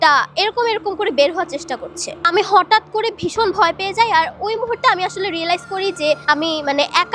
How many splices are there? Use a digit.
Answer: 0